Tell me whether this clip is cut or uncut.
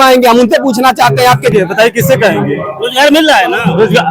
cut